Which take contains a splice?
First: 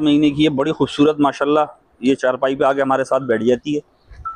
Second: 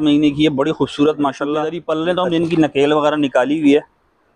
second; 1 cut; at 1.7 s

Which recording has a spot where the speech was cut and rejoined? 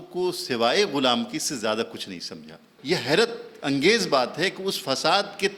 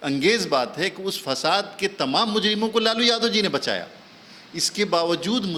first; 1 cut; at 2.7 s

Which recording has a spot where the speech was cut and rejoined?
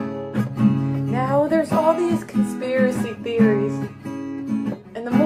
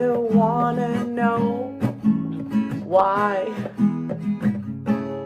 second; 1 cut; at 2.8 s

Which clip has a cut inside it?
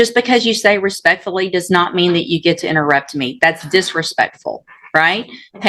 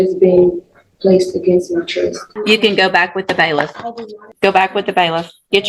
second; 2 cuts; at 2.3 s, 4.3 s

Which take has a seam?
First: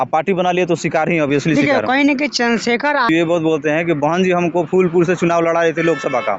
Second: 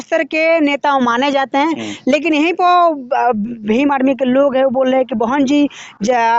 first; 1 cut; at 3.1 s

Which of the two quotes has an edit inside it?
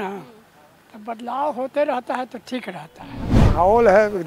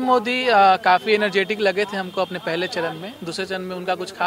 first; 1 cut; at 3.3 s

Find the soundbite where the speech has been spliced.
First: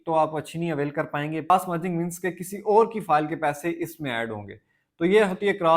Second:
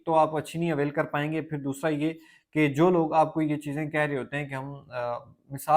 first; 1 cut; at 1.5 s

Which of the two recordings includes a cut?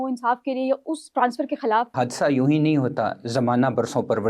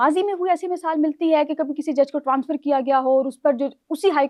first; 1 cut; at 1.9 s

